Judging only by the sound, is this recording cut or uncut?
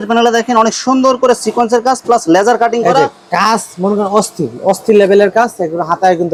uncut